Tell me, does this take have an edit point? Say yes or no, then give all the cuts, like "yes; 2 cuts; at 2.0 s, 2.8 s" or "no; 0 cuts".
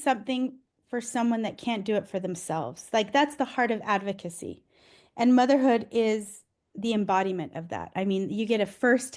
no; 0 cuts